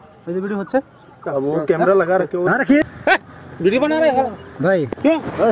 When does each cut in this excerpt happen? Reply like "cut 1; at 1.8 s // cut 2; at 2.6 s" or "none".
cut 1; at 2.8 s